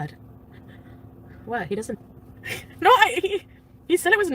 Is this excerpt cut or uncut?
cut